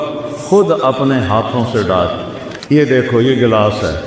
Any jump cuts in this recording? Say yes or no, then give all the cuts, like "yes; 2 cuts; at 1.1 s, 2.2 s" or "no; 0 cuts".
yes; 1 cut; at 2.4 s